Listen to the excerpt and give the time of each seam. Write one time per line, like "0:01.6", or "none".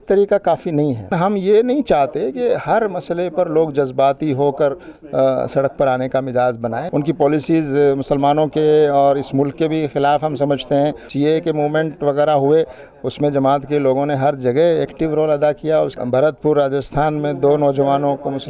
0:01.1
0:06.8
0:11.1
0:16.0